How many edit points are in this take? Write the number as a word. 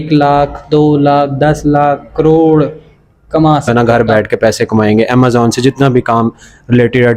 one